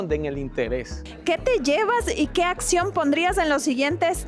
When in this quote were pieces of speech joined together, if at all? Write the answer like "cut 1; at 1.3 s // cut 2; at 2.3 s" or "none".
cut 1; at 1.1 s